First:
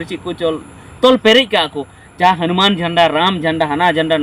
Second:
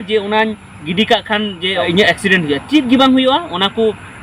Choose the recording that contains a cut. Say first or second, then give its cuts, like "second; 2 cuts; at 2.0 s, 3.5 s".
second; 1 cut; at 1.8 s